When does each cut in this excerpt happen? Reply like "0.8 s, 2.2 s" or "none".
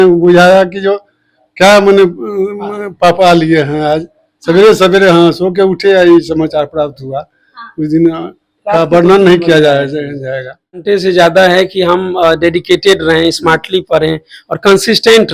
10.8 s